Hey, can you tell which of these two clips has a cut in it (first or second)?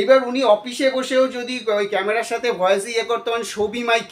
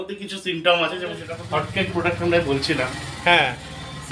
second